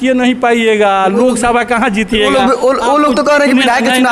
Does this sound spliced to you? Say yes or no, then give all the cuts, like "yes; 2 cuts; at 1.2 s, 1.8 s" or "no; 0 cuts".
no; 0 cuts